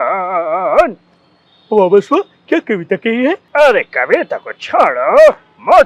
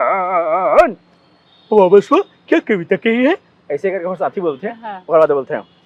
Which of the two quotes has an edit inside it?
first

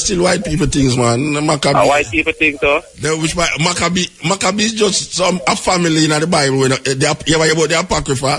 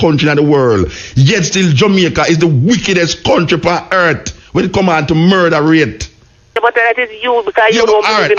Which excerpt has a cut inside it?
second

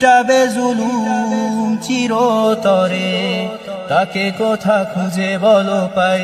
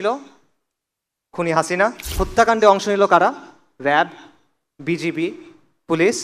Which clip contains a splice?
second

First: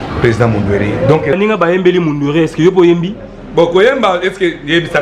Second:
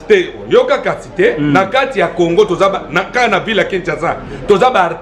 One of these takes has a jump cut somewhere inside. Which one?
first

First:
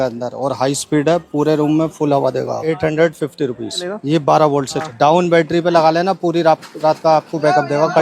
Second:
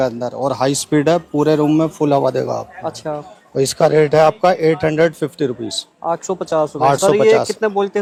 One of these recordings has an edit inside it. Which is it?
first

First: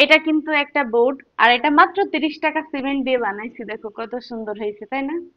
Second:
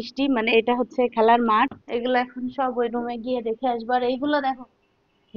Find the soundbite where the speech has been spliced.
second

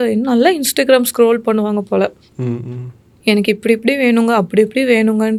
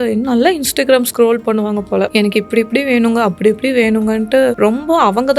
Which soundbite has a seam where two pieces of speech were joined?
second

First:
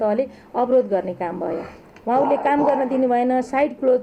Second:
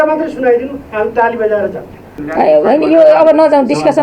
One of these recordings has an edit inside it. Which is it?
second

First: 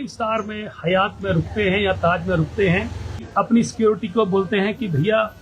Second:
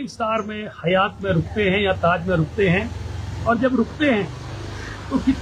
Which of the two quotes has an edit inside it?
first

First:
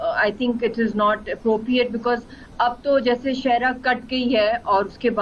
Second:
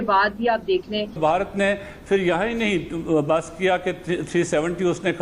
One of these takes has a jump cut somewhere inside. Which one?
second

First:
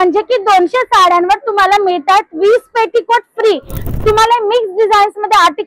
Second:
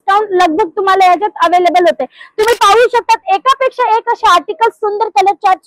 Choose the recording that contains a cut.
first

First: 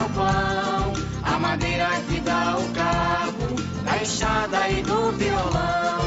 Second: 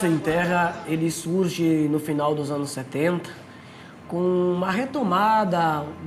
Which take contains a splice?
first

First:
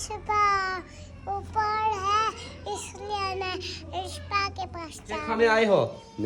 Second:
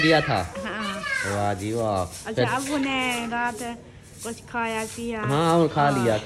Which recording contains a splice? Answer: first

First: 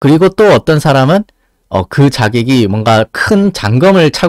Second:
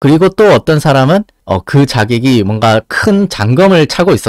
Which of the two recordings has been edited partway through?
second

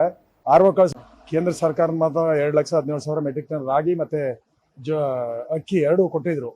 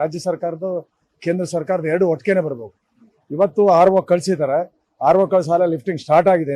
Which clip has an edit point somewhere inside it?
first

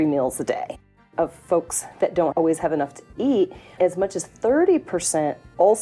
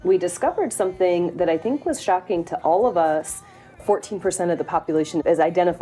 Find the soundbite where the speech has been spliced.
first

